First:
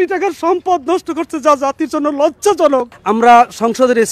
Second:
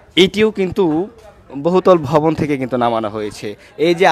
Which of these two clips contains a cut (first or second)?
first